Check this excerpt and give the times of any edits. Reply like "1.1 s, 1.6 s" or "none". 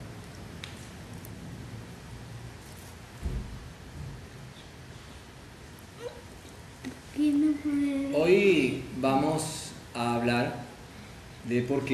5.8 s

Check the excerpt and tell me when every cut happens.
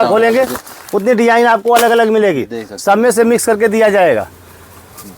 none

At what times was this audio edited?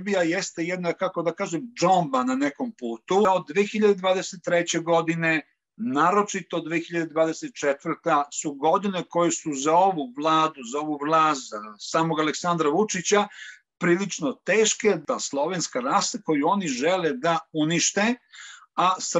3.2 s, 15.0 s

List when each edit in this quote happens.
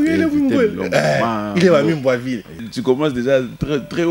2.7 s

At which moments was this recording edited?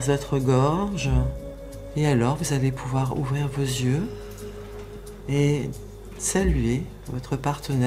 none

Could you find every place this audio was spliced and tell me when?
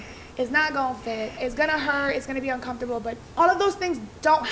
1.4 s, 3.2 s

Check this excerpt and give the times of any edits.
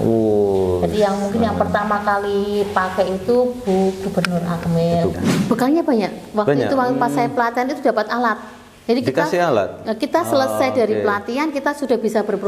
5.1 s

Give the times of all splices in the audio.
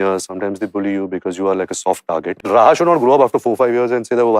2.3 s

